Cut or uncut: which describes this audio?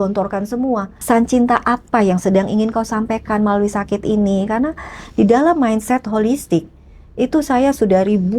cut